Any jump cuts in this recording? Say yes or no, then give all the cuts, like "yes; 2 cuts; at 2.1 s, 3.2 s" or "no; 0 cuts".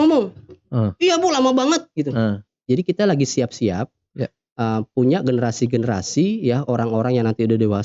yes; 1 cut; at 2.5 s